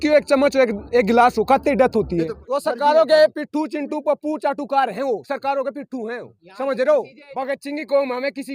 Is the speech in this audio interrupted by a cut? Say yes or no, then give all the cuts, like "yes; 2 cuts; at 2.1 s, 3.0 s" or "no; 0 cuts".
yes; 2 cuts; at 2.4 s, 7.2 s